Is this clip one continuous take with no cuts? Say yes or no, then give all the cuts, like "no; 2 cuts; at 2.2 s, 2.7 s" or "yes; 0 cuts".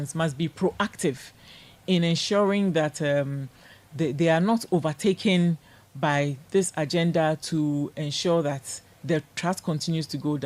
yes; 0 cuts